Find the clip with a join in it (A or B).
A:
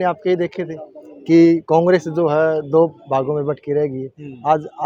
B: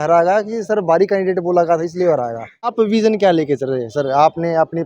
B